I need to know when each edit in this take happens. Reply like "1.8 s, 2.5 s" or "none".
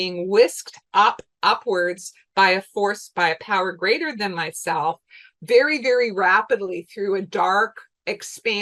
none